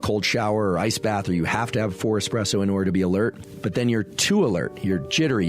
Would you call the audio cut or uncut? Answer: cut